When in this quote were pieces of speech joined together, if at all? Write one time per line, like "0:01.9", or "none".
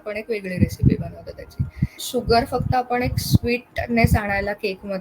0:02.0